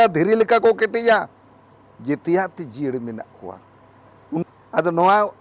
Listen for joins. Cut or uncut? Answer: cut